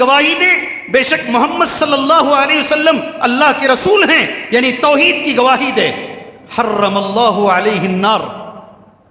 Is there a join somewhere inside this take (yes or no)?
no